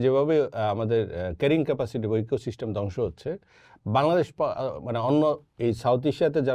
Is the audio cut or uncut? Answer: uncut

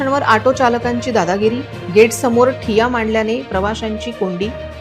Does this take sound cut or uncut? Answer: uncut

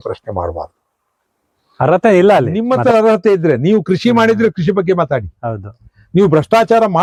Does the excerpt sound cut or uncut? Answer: uncut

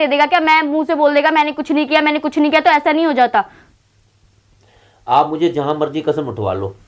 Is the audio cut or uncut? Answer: uncut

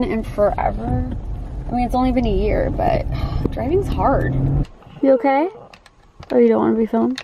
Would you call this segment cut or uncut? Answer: cut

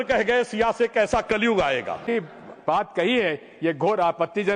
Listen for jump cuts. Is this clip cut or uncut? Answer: cut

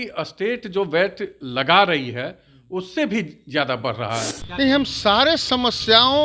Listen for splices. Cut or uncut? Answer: cut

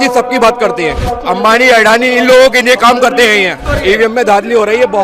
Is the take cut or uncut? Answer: cut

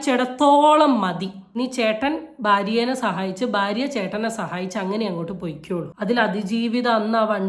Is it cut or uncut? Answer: cut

